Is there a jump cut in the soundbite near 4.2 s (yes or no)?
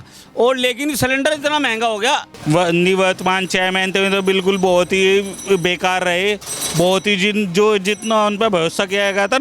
no